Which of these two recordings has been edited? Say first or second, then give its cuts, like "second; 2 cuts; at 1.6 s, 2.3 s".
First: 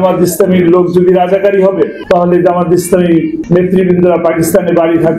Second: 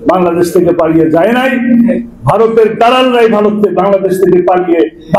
first; 2 cuts; at 2.0 s, 3.4 s